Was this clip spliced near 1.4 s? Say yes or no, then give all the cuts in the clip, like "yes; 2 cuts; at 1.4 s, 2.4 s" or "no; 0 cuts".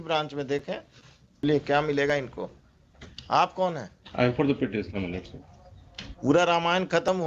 yes; 1 cut; at 1.4 s